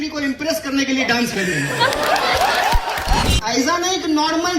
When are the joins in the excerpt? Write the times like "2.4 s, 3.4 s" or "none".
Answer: 3.3 s